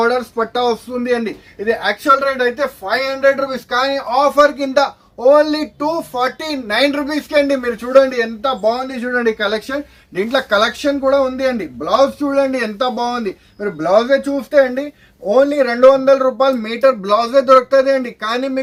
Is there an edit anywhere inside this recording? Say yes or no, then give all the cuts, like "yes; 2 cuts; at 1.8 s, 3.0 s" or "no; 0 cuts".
no; 0 cuts